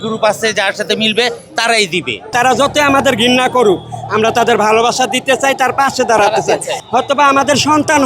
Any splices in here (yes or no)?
yes